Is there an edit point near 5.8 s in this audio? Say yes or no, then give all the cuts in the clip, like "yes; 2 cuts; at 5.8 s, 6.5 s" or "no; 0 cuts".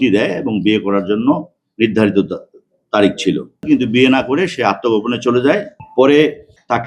yes; 1 cut; at 5.8 s